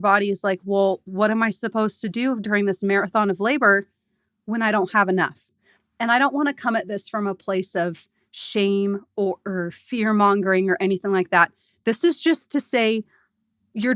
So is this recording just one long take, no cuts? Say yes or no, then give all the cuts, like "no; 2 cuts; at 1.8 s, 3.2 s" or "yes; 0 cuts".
yes; 0 cuts